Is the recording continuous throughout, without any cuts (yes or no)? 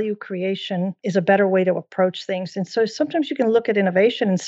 no